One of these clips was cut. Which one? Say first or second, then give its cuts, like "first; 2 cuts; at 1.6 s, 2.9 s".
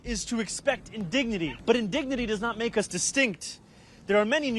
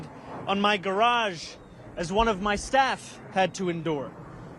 first; 1 cut; at 1.6 s